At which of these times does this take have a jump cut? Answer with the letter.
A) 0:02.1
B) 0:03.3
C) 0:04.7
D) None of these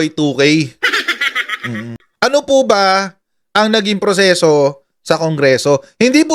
A